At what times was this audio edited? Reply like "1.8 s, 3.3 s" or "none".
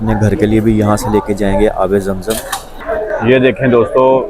2.7 s